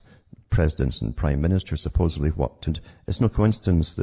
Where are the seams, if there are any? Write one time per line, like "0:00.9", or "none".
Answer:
none